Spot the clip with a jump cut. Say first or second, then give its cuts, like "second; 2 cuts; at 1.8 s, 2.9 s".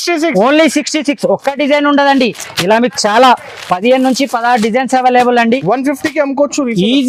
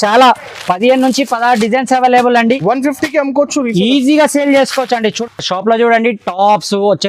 second; 1 cut; at 5.1 s